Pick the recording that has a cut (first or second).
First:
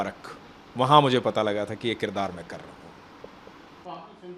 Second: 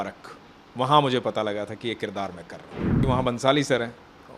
second